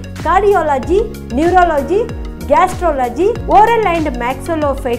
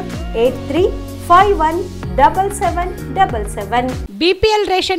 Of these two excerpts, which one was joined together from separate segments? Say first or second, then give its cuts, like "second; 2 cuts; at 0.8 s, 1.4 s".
second; 1 cut; at 4.0 s